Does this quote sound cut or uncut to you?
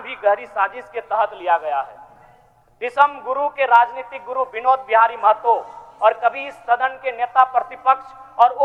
uncut